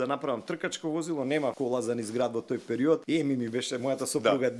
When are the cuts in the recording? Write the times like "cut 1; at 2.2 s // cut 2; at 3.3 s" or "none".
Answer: cut 1; at 1.6 s // cut 2; at 3.0 s